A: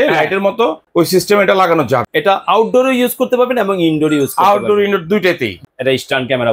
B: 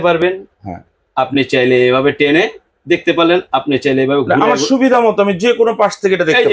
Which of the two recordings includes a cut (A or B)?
A